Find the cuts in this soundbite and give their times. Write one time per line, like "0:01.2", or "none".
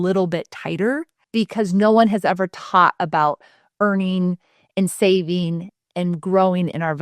0:01.1